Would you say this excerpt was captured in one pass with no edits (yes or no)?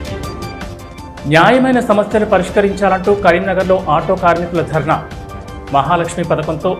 yes